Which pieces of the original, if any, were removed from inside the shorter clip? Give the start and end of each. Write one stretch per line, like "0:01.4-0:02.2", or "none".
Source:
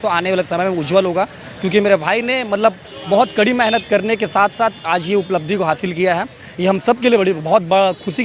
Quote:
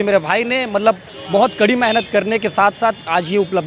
none

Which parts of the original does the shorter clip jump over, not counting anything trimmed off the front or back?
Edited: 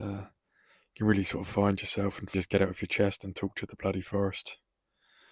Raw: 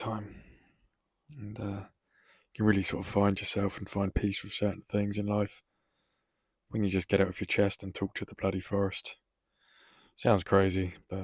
0:03.9-0:06.9

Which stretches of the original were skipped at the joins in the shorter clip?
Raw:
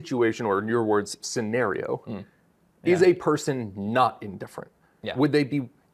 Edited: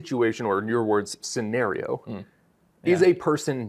none

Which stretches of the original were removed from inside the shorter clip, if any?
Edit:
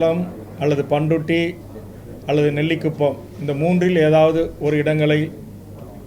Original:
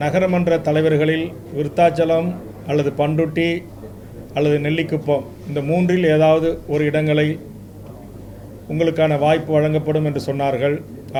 none

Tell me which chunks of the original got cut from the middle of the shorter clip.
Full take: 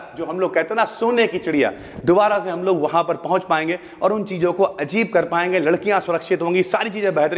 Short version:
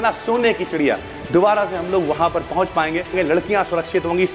0:03.8-0:05.5

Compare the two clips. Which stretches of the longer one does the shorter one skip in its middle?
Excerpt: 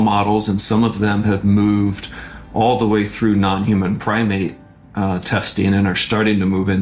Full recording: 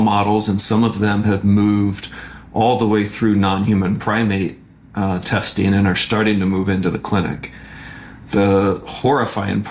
none

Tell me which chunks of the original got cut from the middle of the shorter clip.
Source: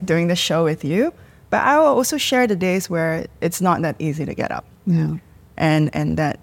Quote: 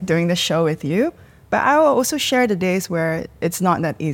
none

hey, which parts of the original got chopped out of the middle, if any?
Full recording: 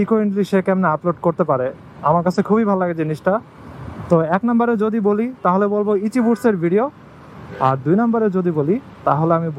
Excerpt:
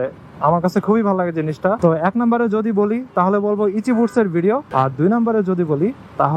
0:03.4-0:04.1
0:06.9-0:07.5

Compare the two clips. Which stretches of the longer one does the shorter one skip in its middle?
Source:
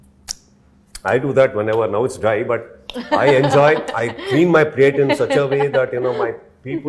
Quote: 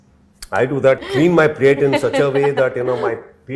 0:01.6-0:04.2

